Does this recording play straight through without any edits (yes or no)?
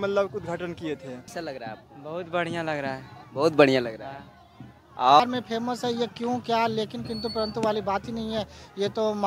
no